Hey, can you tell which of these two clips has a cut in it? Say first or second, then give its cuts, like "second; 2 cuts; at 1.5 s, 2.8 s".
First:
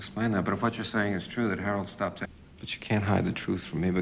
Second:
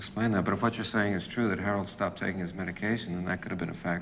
second; 1 cut; at 2.2 s